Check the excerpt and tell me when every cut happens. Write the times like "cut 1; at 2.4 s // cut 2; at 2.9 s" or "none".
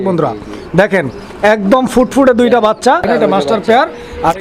cut 1; at 3.1 s

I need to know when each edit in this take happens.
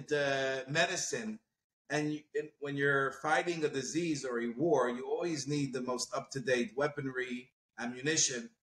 none

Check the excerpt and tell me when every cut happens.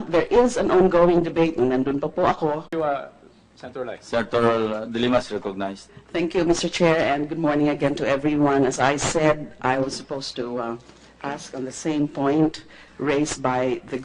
none

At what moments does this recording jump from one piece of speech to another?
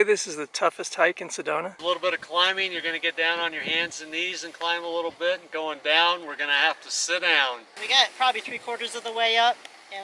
cut 1; at 1.8 s // cut 2; at 7.7 s

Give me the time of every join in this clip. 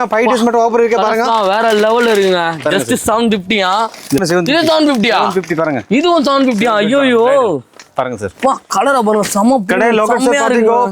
cut 1; at 4.2 s

